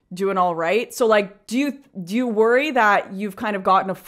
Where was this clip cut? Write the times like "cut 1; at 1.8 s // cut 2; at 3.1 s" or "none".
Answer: cut 1; at 1.4 s